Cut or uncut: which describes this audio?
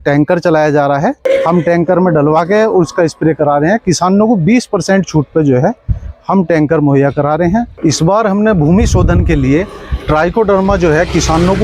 cut